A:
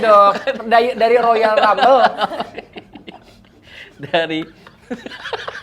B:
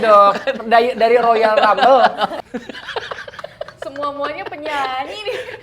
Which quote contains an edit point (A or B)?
B